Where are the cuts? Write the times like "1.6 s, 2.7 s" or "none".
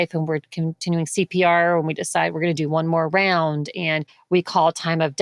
none